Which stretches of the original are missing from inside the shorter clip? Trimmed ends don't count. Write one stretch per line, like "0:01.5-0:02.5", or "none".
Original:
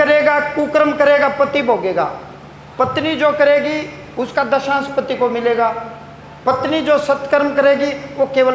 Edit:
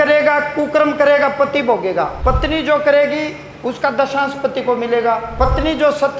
0:02.1-0:02.7
0:05.8-0:06.3